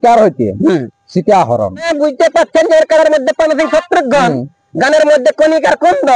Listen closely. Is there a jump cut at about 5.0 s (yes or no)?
no